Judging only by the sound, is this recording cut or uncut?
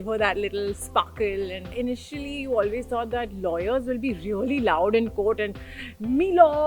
cut